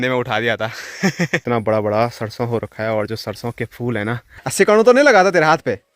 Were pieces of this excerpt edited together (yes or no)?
yes